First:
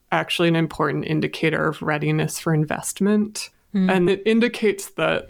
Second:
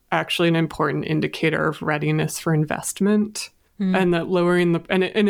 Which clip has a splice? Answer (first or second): first